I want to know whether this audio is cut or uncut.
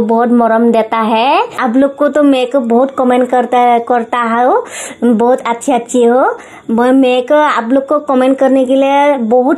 uncut